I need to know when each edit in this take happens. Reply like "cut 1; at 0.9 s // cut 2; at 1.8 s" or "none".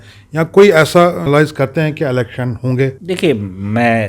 cut 1; at 1.2 s // cut 2; at 3.0 s